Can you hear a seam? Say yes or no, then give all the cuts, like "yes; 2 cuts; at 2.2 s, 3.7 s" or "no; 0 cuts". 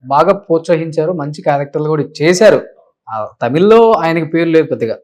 no; 0 cuts